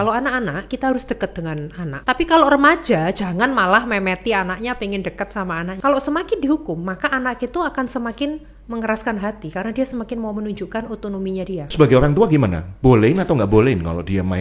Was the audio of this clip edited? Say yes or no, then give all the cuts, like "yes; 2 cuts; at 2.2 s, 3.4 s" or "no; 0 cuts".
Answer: yes; 3 cuts; at 1.9 s, 5.8 s, 11.7 s